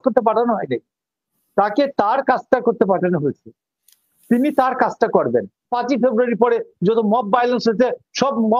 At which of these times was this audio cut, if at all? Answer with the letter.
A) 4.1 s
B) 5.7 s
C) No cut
B